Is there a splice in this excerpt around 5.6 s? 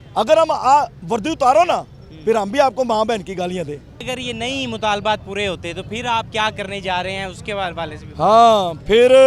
no; 1 cut; at 4.1 s

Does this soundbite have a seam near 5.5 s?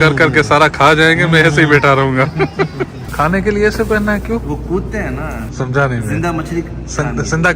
yes; 2 cuts; at 3.0 s, 5.5 s

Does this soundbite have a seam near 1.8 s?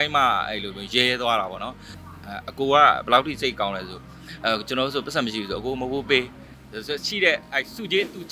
yes; 1 cut; at 1.8 s

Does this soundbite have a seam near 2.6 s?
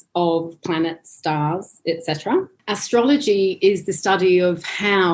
yes; 1 cut; at 2.6 s

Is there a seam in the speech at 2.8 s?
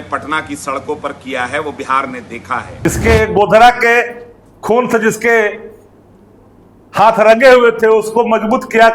yes; 1 cut; at 2.8 s

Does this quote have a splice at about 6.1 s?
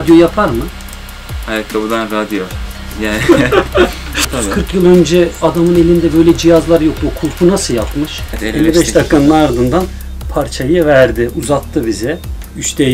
no; 2 cuts; at 4.2 s, 8.3 s

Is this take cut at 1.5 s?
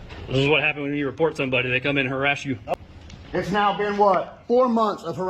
no; 1 cut; at 2.7 s

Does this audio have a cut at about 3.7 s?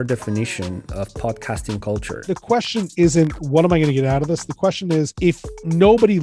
no; 2 cuts; at 2.1 s, 5.1 s

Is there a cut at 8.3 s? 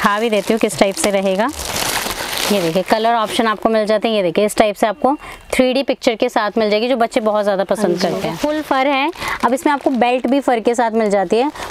yes; 2 cuts; at 1.7 s, 8.3 s

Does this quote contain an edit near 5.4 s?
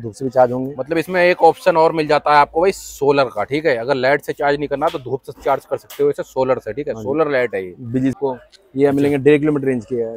no; 1 cut; at 8.1 s

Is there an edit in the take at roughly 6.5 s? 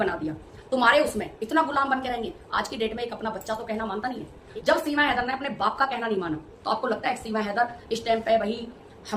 yes; 2 cuts; at 4.4 s, 6.5 s

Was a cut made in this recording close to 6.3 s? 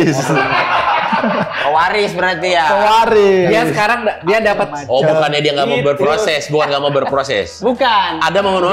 no; 1 cut; at 4.8 s

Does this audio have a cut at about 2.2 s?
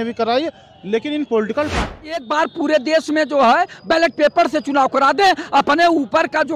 yes; 1 cut; at 2.2 s

